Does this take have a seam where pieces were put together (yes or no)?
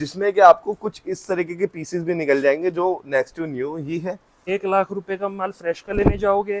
yes